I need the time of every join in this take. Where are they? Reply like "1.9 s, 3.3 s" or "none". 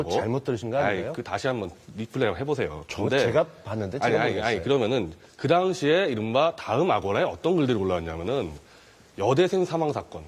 none